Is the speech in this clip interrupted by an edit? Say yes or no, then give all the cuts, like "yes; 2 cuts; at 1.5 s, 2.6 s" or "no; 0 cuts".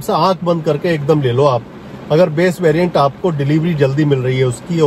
no; 0 cuts